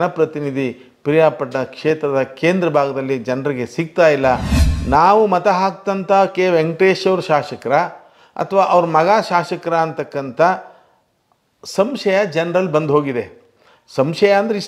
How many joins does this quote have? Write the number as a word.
one